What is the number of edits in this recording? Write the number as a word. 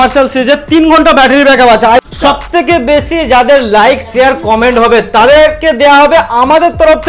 one